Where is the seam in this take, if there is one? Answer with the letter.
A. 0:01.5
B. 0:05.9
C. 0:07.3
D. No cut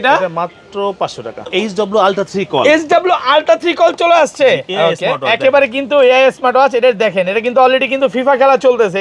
A